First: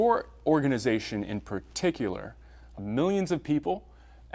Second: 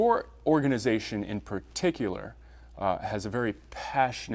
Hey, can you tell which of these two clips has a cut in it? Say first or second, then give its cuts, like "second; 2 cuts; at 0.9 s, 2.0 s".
second; 1 cut; at 2.8 s